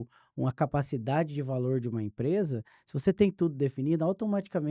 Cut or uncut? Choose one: uncut